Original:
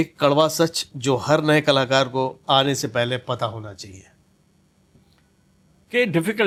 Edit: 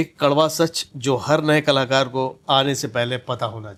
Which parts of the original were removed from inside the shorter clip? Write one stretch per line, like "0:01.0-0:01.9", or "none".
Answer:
none